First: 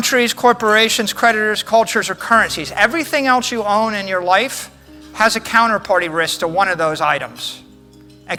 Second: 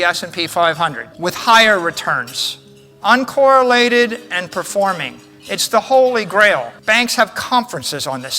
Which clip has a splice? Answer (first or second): second